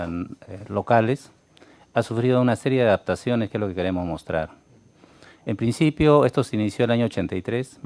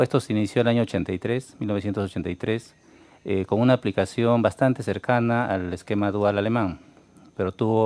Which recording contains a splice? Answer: second; 1 cut; at 6.4 s

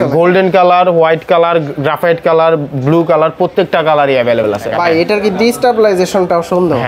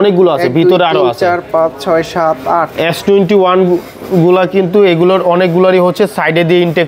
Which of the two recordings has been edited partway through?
first; 1 cut; at 4.6 s

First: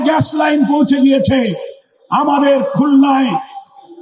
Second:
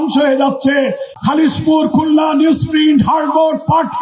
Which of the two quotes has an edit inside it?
second; 1 cut; at 1.1 s

